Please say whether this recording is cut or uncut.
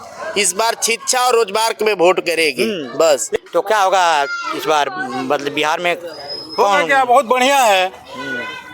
cut